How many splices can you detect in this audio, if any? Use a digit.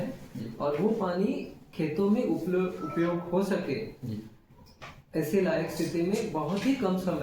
0